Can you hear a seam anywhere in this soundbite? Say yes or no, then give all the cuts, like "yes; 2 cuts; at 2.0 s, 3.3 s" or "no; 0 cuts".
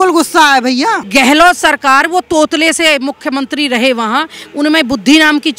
yes; 1 cut; at 1.0 s